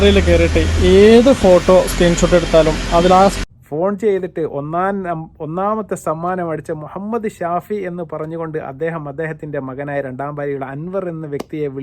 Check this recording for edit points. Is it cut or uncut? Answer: cut